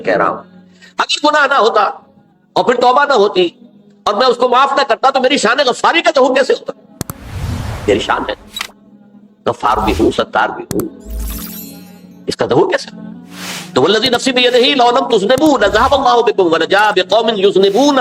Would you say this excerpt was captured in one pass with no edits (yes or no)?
yes